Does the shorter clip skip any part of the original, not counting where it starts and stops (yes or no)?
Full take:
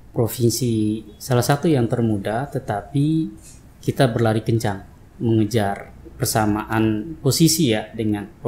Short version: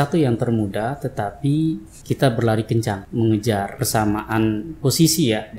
yes